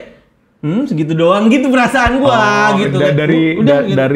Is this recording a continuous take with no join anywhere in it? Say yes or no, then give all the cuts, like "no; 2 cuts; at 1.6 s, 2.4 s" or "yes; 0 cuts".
yes; 0 cuts